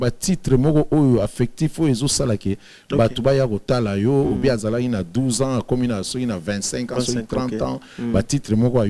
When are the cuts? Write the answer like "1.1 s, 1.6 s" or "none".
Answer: none